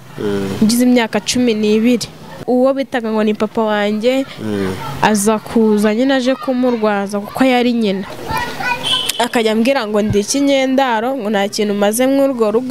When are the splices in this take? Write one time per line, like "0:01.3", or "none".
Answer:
0:02.4
0:08.1